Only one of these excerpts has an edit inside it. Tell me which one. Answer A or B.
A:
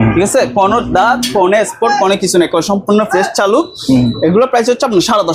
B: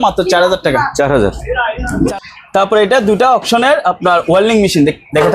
B